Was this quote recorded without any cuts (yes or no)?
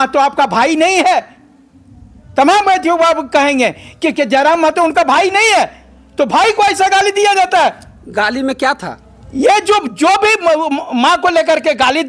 yes